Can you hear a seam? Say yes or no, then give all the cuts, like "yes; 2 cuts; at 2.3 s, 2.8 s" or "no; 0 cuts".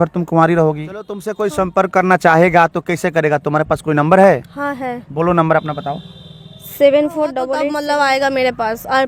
yes; 2 cuts; at 1.3 s, 7.6 s